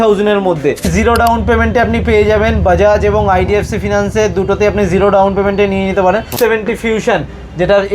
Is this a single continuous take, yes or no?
no